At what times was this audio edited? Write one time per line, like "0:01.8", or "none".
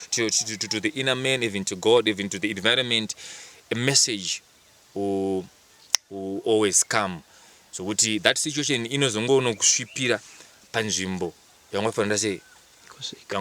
none